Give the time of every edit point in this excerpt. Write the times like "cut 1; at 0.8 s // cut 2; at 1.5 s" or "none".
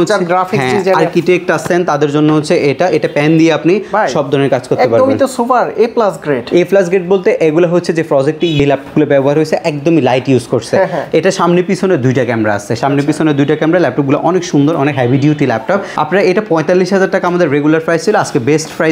none